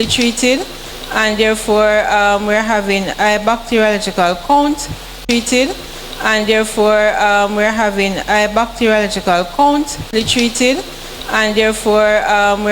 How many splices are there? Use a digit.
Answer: 5